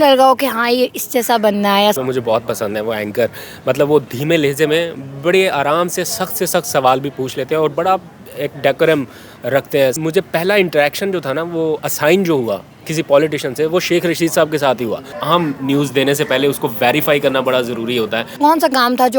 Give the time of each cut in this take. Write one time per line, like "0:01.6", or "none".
0:02.0
0:10.0
0:15.1
0:18.4